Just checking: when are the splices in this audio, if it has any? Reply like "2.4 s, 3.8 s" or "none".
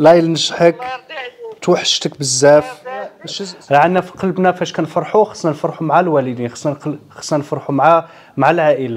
3.3 s